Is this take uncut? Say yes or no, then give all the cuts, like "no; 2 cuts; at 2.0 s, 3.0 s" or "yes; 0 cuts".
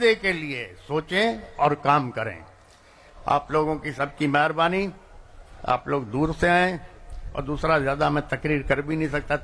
yes; 0 cuts